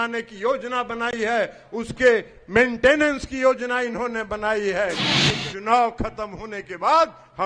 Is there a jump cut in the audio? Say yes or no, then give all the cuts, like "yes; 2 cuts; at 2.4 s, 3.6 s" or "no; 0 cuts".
yes; 1 cut; at 5.1 s